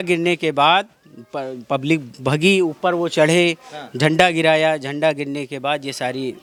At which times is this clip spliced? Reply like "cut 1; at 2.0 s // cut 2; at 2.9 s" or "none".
none